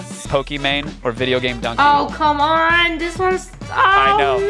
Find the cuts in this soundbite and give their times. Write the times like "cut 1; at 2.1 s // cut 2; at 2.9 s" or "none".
none